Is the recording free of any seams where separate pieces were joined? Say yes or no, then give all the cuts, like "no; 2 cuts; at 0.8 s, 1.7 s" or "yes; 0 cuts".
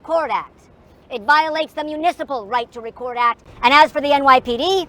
no; 1 cut; at 3.5 s